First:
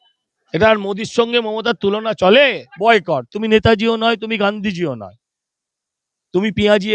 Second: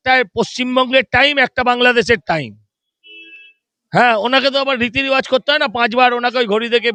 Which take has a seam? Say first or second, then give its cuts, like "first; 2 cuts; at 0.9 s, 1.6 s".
first; 1 cut; at 2.7 s